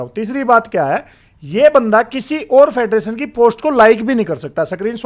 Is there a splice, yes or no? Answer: no